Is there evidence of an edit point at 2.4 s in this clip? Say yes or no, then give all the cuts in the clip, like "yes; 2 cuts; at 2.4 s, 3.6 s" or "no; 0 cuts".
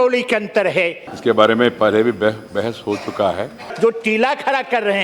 no; 2 cuts; at 1.0 s, 3.7 s